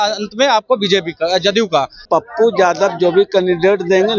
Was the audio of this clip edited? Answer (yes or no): yes